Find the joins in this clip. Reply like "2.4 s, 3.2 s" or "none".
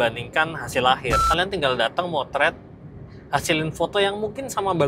1.3 s